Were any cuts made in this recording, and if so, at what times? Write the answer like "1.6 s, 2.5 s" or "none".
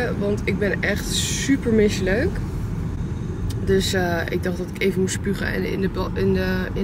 none

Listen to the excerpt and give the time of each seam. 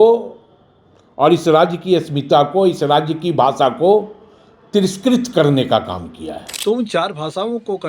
6.5 s

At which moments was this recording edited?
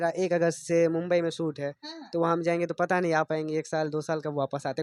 none

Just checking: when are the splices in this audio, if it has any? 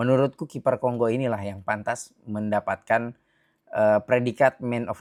none

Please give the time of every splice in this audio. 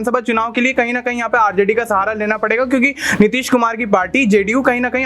none

